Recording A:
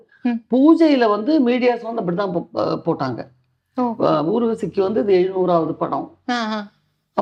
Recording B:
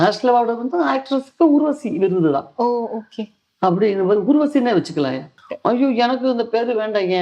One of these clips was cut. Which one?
B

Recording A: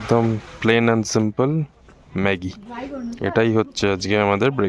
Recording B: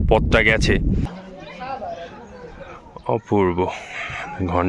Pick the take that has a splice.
B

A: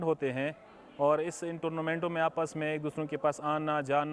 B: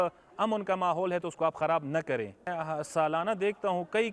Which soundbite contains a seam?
B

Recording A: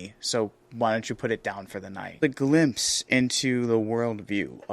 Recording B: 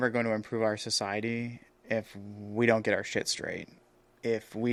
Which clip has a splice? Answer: A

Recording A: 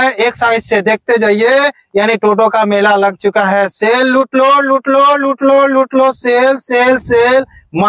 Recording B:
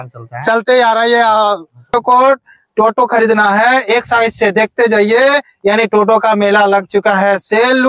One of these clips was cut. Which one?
B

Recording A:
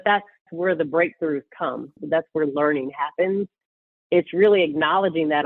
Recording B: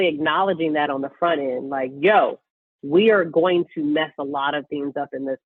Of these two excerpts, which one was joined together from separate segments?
A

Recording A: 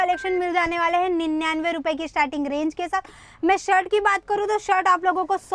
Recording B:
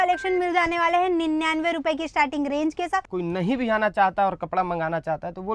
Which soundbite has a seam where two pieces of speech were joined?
B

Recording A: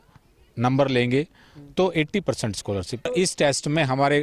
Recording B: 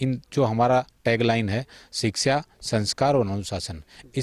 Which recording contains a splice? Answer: A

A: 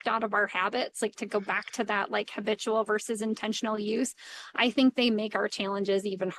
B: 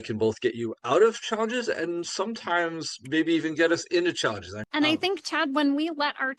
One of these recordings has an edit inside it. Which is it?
B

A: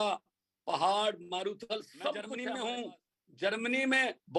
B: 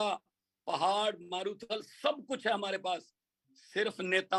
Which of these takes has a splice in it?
A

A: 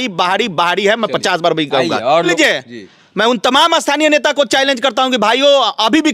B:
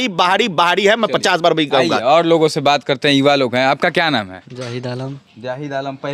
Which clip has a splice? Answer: A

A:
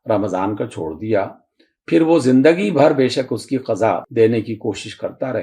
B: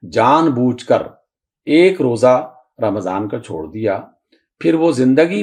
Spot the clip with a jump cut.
A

